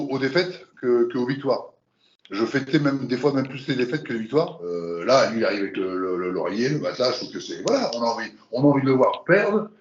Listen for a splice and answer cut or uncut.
cut